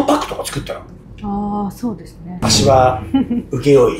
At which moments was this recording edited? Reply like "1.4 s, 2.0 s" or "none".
2.2 s